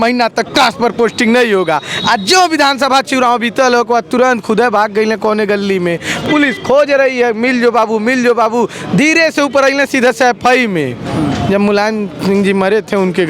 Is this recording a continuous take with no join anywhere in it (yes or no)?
yes